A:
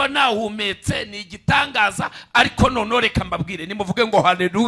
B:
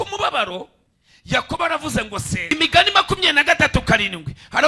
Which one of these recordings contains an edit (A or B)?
B